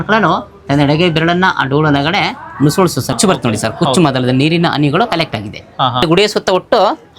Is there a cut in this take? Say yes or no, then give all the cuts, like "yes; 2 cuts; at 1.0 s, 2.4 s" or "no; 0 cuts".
yes; 2 cuts; at 3.2 s, 6.0 s